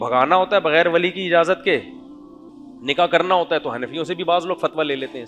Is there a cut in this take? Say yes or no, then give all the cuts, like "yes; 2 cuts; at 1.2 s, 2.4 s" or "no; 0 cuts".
no; 0 cuts